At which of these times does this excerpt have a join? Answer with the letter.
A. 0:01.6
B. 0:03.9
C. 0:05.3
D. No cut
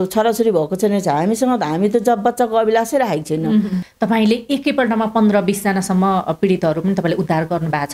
B